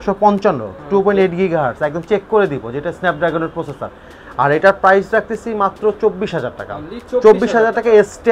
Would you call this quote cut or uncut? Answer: uncut